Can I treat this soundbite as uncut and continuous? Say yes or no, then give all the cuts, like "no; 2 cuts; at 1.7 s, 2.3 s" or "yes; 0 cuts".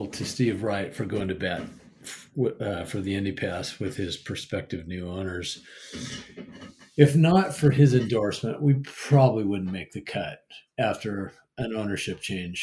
yes; 0 cuts